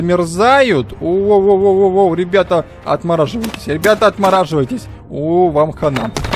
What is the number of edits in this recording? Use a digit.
0